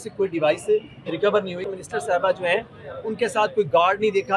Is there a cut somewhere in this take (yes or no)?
yes